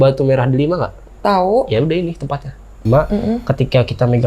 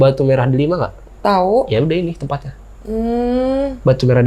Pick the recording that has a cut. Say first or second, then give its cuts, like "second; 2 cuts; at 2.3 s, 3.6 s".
first; 1 cut; at 2.8 s